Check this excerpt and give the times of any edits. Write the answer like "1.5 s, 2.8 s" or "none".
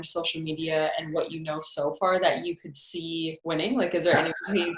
none